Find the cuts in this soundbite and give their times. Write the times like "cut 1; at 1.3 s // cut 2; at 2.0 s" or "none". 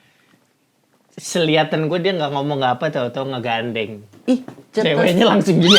none